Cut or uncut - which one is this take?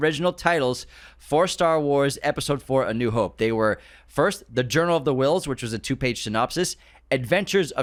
uncut